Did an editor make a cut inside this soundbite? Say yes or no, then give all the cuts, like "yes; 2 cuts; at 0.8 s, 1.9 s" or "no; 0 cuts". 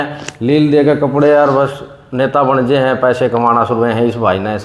no; 0 cuts